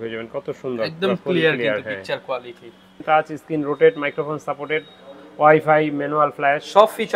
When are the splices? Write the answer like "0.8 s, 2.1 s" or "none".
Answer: 2.8 s